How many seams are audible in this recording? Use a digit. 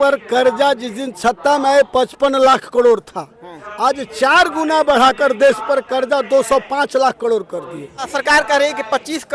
1